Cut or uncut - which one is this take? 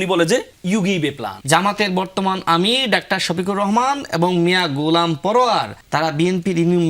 cut